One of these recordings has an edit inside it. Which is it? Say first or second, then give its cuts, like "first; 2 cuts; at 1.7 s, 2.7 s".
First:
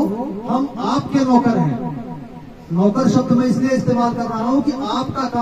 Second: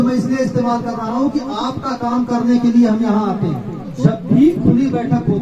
second; 1 cut; at 3.9 s